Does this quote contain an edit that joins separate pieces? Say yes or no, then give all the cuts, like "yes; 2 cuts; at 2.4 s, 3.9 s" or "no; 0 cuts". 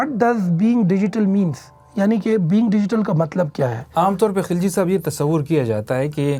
no; 0 cuts